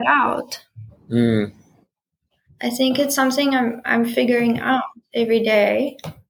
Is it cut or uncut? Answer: uncut